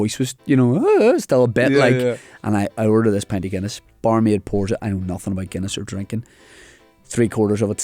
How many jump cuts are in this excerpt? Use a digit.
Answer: 1